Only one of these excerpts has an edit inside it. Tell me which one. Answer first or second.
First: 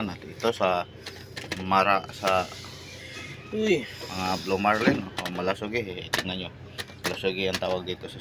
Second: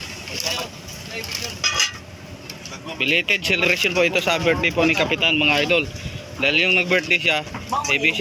second